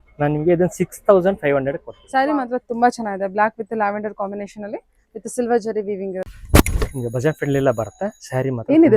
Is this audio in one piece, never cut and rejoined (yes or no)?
no